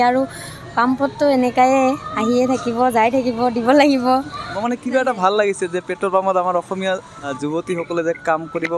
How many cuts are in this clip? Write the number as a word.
two